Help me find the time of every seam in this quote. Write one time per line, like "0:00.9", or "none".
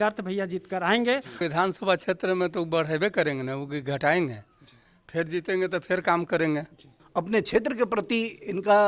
0:01.4
0:06.9